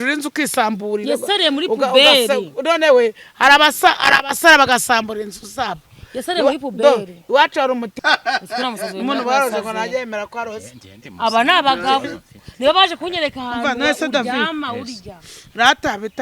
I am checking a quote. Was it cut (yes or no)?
yes